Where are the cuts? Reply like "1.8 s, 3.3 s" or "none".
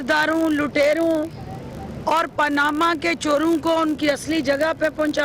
none

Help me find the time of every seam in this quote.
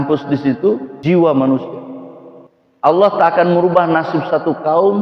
0.9 s

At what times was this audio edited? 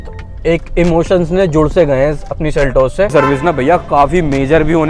3.1 s

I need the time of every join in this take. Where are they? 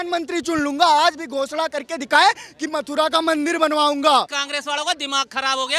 4.4 s

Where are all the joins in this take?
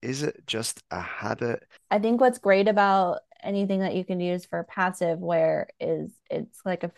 1.7 s

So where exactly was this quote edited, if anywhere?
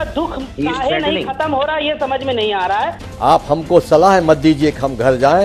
3.0 s

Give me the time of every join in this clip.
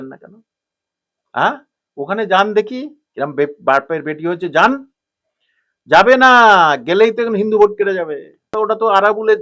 8.4 s

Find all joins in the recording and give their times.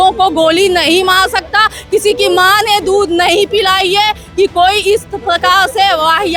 none

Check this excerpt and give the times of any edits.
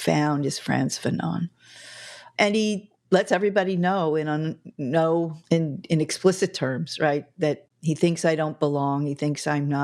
2.3 s, 5.4 s

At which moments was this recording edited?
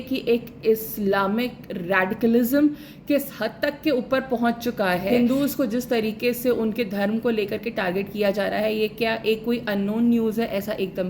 5.1 s

